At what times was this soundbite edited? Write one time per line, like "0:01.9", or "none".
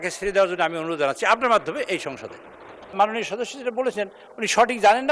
0:02.9